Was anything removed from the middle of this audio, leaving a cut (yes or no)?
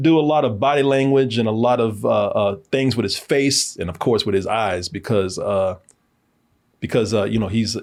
no